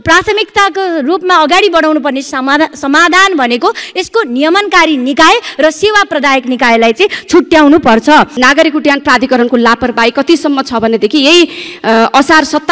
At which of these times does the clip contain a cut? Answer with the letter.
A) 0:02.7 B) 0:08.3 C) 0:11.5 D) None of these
B